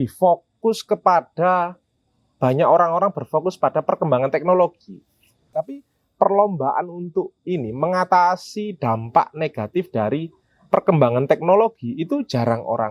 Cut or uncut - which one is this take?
cut